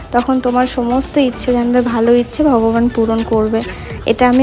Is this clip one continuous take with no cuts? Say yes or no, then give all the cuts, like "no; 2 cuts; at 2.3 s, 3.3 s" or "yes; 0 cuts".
yes; 0 cuts